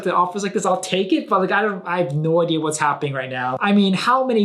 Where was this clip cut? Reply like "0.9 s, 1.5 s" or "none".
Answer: 3.5 s